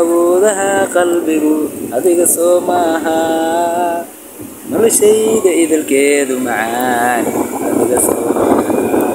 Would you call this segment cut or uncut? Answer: uncut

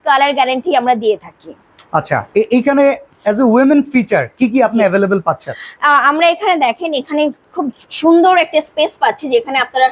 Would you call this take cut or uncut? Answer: uncut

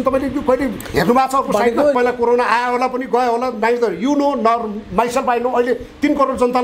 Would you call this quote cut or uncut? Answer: cut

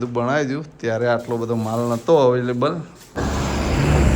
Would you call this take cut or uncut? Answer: cut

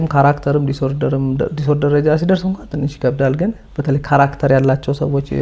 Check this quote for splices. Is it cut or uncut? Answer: uncut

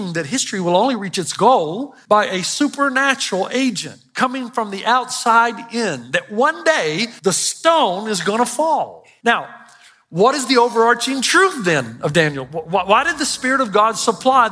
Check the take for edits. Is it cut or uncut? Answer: cut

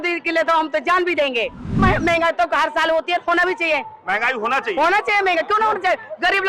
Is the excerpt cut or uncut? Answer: cut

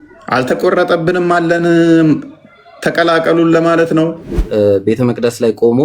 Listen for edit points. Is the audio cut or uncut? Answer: cut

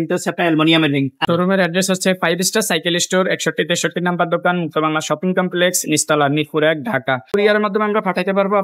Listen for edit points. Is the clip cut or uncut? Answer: cut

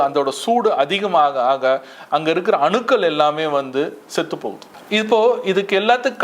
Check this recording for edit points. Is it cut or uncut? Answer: cut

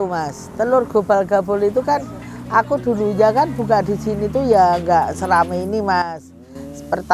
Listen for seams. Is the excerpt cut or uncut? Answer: uncut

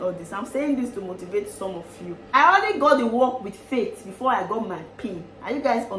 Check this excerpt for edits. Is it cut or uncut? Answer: cut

